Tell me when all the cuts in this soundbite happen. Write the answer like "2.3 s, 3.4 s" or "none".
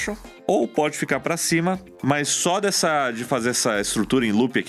none